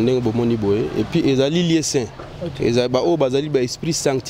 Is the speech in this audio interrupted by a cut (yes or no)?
no